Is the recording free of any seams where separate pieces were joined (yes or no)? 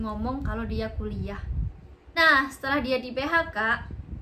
no